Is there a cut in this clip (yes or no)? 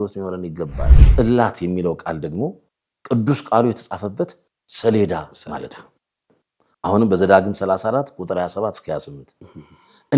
yes